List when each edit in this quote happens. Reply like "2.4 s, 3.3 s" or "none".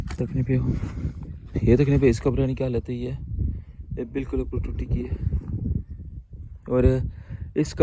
1.6 s